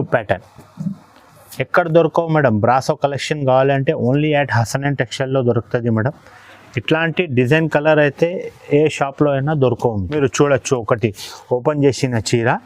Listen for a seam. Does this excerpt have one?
yes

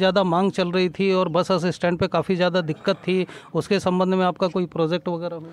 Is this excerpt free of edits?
yes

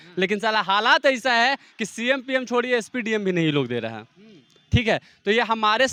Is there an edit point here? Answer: no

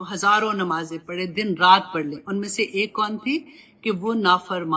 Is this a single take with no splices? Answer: yes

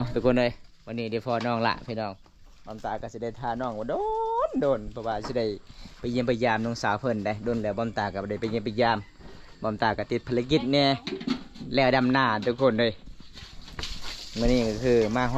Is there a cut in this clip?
no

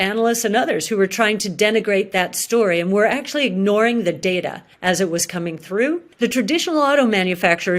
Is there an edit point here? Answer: yes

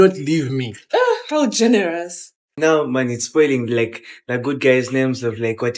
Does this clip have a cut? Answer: yes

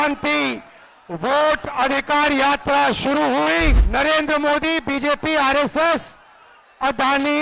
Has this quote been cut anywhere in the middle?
yes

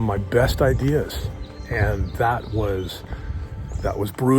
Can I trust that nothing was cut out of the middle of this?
yes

